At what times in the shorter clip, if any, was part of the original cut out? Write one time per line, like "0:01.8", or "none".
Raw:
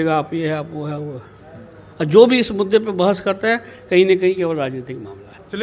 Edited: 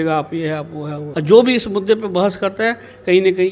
0:01.0